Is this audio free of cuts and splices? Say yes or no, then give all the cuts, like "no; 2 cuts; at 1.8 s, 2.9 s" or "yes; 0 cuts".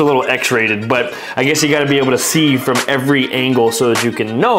yes; 0 cuts